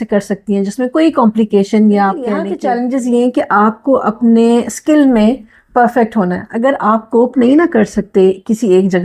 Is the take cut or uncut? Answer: cut